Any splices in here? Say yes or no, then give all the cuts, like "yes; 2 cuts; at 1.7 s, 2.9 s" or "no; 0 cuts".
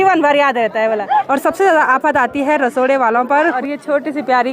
yes; 2 cuts; at 1.3 s, 3.6 s